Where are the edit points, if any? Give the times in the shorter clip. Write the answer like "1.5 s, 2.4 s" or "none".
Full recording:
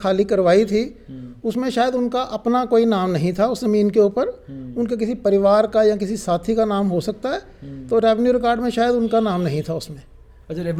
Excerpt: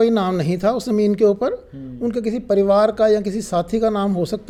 none